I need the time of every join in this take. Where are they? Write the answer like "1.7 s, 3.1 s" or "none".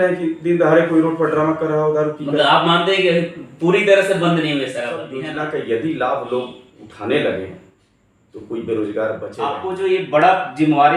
5.1 s, 9.5 s